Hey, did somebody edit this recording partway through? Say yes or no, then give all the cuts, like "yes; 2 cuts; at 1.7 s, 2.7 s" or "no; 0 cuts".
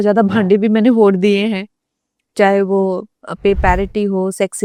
no; 0 cuts